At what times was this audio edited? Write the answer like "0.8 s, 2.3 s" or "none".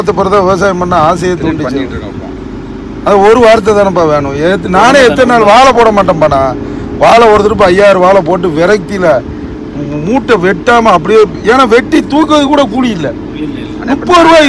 none